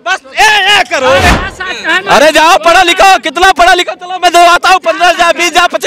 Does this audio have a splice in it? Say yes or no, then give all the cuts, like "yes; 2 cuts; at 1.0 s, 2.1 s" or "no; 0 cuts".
yes; 1 cut; at 1.3 s